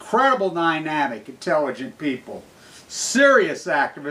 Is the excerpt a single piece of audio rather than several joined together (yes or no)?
yes